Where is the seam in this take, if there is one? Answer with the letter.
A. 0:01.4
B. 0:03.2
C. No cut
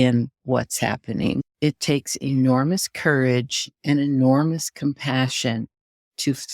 A